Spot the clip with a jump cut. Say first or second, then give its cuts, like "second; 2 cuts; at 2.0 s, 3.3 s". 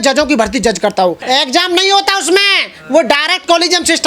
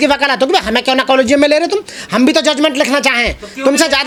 first; 1 cut; at 1.2 s